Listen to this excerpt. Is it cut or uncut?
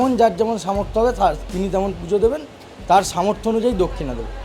uncut